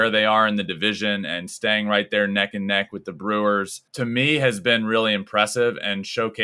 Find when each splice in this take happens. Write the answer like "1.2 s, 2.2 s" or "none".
3.8 s